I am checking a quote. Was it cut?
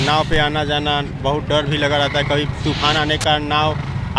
no; 0 cuts

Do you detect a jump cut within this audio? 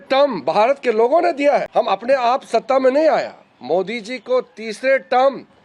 yes; 1 cut; at 1.7 s

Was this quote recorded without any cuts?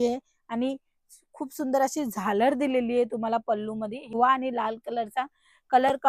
no; 1 cut; at 4.1 s

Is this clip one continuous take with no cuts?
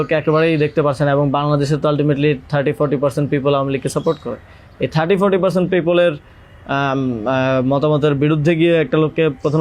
yes; 0 cuts

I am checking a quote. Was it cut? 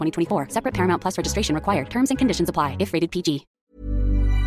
yes; 1 cut; at 3.5 s

